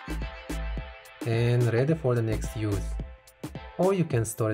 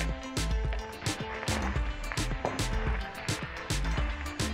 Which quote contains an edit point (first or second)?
first